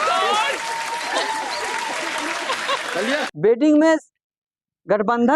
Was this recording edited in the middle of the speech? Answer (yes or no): yes